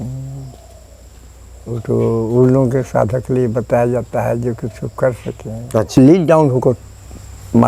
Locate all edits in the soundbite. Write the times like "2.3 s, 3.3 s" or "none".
5.9 s